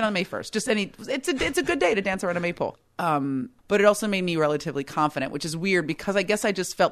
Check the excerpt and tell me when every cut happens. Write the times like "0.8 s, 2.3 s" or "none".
3.0 s